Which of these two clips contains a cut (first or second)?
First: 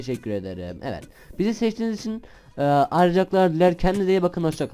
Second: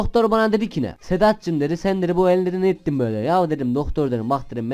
second